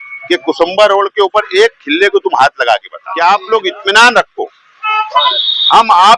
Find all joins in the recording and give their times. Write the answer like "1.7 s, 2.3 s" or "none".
3.0 s